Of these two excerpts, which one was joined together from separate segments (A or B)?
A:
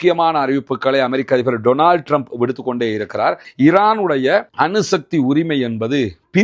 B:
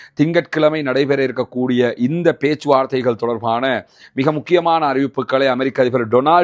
A